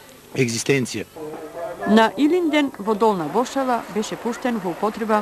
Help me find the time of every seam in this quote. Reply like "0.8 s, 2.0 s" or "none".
1.2 s